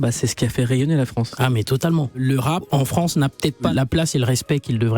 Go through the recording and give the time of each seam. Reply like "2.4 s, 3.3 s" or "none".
2.4 s, 3.7 s